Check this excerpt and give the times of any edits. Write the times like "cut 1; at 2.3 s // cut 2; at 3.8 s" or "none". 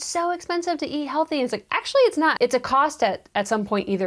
cut 1; at 2.3 s